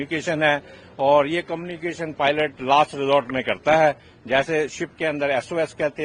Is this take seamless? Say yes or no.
yes